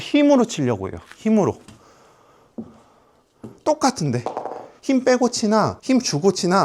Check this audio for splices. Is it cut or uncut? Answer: cut